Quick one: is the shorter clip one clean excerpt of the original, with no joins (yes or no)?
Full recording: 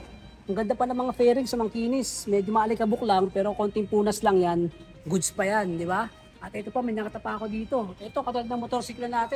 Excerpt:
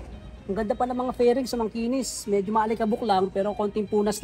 yes